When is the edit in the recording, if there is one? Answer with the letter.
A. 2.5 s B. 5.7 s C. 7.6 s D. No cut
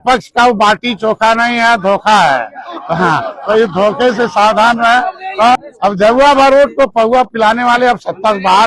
B